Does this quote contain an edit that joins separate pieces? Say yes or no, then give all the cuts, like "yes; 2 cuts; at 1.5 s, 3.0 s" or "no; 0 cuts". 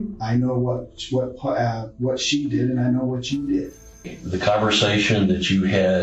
yes; 1 cut; at 4.2 s